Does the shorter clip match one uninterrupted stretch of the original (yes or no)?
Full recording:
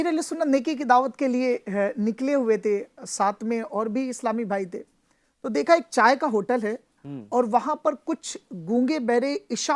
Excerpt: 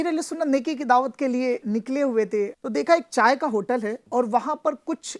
no